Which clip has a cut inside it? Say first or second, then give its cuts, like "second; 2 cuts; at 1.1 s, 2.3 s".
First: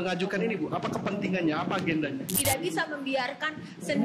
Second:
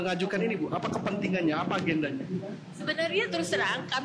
first; 1 cut; at 2.3 s